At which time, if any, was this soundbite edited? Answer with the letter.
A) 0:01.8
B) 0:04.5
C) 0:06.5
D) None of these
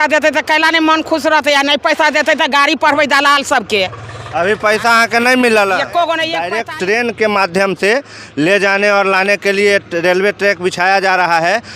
C